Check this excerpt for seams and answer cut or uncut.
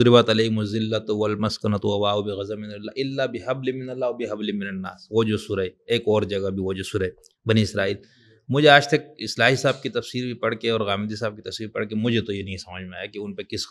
uncut